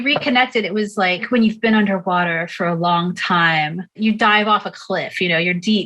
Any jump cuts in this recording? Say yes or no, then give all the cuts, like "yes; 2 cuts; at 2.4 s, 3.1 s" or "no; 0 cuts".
yes; 2 cuts; at 1.2 s, 3.9 s